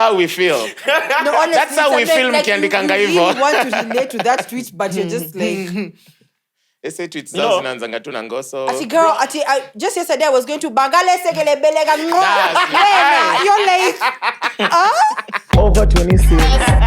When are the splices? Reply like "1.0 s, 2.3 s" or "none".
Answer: 15.4 s